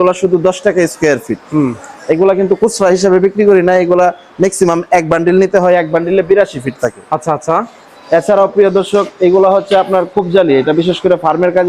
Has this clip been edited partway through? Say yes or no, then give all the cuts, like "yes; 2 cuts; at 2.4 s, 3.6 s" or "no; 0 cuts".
no; 0 cuts